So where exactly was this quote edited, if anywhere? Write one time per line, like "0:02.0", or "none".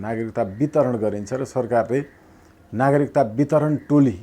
none